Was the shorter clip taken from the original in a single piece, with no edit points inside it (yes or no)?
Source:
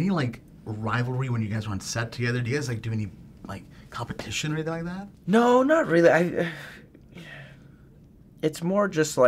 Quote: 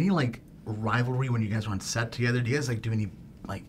yes